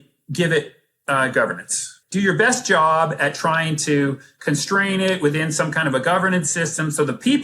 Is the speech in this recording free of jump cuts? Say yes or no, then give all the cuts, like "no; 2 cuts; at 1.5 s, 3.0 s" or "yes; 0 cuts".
no; 1 cut; at 1.9 s